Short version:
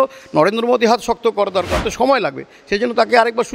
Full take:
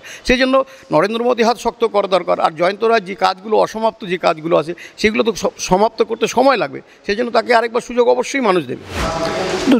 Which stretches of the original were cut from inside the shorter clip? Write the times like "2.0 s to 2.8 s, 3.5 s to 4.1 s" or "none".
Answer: 2.3 s to 6.1 s